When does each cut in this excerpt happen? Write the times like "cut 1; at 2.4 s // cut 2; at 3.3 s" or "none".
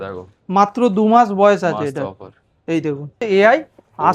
cut 1; at 3.2 s